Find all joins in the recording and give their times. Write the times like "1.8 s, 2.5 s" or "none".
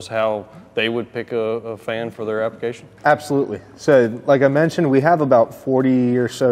none